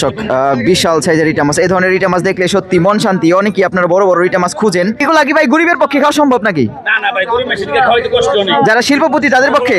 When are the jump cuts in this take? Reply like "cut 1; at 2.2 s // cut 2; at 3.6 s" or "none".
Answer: cut 1; at 5.0 s